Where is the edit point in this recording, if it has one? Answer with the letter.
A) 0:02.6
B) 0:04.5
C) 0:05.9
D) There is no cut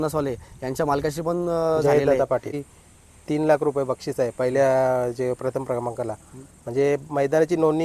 A